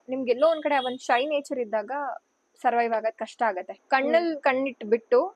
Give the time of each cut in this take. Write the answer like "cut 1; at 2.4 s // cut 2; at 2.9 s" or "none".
cut 1; at 3.7 s